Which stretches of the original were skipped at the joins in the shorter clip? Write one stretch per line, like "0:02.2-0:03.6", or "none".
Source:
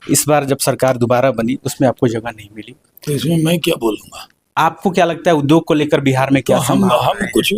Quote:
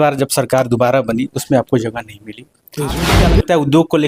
0:03.3-0:04.8